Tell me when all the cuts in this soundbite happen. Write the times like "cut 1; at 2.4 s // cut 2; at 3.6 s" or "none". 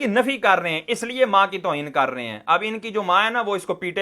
none